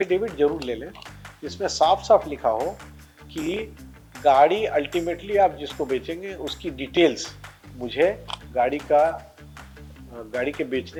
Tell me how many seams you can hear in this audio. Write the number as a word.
zero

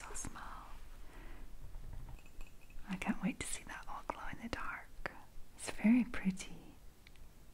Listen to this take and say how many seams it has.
one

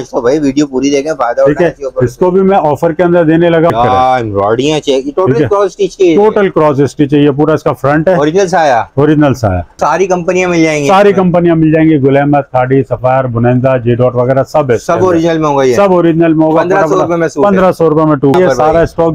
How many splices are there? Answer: three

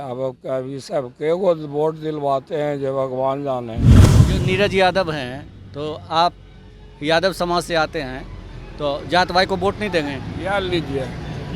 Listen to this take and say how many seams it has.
one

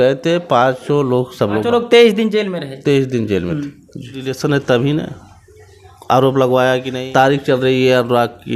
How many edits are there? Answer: three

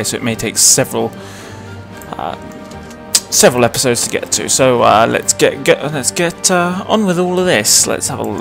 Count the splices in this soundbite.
zero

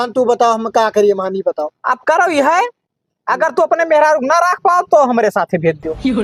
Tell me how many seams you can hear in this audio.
zero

